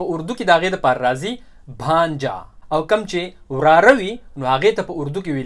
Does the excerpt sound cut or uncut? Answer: cut